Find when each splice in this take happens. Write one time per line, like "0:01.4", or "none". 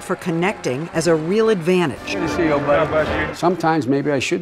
0:03.2